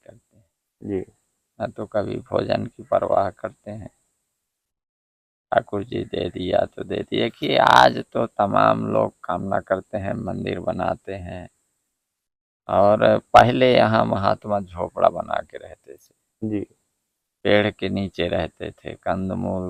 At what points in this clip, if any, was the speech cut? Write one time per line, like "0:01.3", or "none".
none

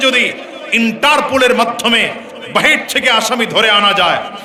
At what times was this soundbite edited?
none

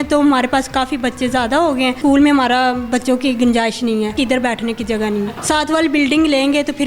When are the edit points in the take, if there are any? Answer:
0:02.0
0:04.1
0:05.4

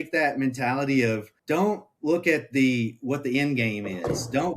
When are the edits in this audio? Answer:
0:01.3

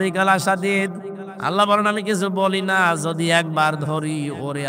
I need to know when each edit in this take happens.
none

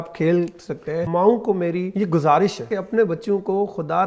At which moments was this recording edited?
0:01.0
0:01.9
0:02.7

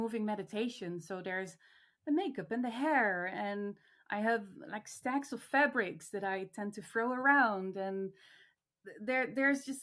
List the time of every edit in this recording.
none

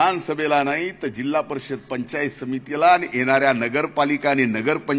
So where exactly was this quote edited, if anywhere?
none

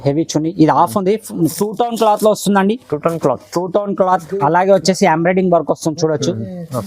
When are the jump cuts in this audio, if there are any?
0:01.5

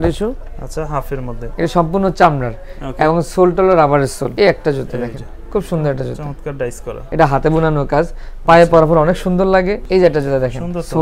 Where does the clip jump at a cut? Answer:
0:01.5
0:04.2
0:07.0
0:09.8

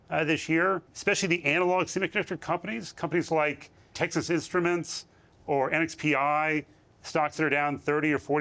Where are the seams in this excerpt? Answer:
0:00.9
0:03.9

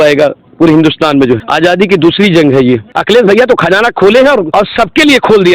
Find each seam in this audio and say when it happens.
0:01.5
0:02.9
0:04.5

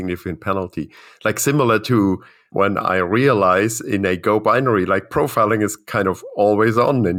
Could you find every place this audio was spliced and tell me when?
none

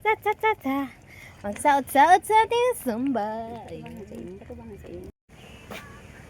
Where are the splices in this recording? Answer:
0:05.1

